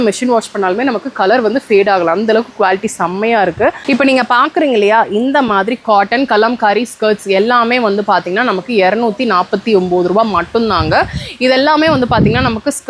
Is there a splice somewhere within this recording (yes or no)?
yes